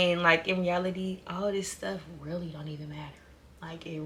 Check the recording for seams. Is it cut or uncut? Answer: uncut